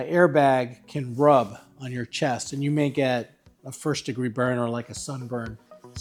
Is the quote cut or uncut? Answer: uncut